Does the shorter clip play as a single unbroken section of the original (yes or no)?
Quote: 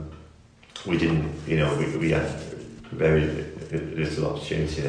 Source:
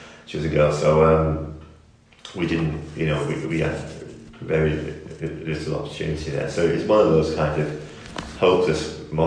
yes